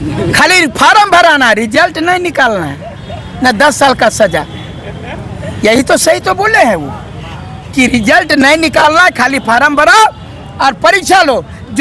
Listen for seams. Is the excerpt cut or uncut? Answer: uncut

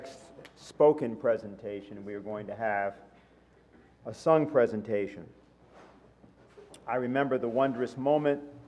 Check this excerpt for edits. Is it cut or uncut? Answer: uncut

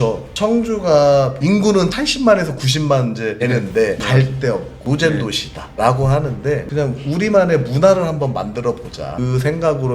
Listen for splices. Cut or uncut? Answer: uncut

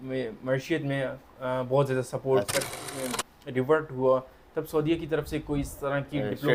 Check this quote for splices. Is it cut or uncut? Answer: cut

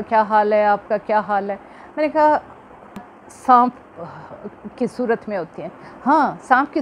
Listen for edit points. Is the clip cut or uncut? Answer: cut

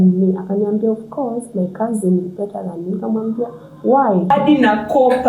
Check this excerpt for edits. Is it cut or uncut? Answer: cut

